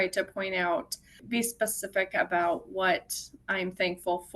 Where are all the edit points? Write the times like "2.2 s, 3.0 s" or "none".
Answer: none